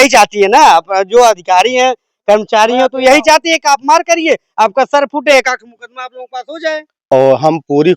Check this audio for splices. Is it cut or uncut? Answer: cut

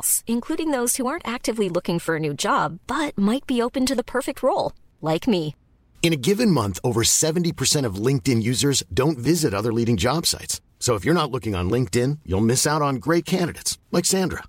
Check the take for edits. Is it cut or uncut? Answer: uncut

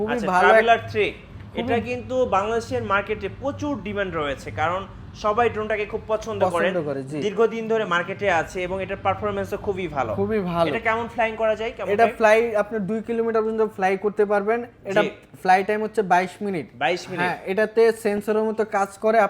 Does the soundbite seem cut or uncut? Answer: uncut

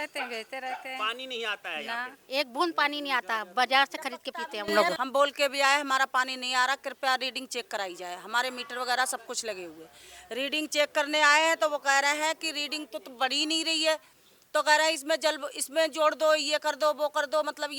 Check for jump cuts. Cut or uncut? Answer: cut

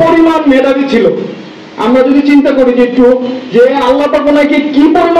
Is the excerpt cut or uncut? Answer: uncut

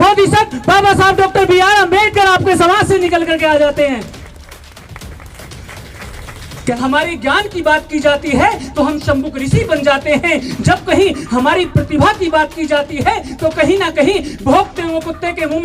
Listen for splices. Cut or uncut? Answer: cut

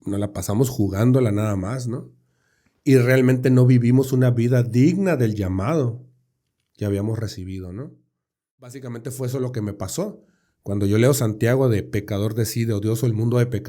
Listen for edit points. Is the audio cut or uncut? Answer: cut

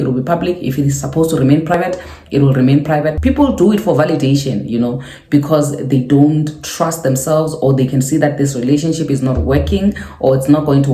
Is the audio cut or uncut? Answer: cut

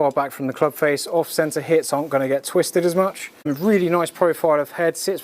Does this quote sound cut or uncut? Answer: cut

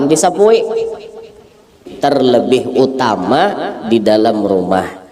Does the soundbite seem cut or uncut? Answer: cut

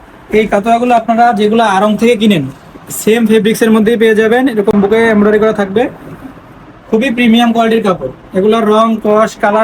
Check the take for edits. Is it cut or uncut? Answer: uncut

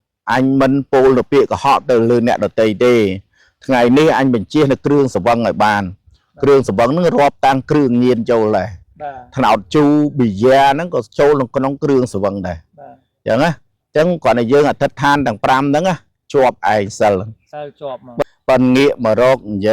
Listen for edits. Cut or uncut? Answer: cut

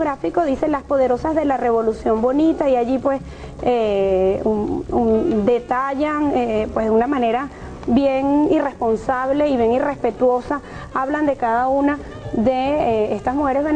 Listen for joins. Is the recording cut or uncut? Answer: cut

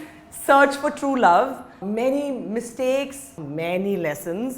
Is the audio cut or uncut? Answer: cut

